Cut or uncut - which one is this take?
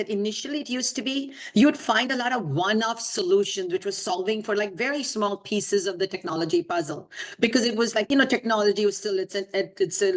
cut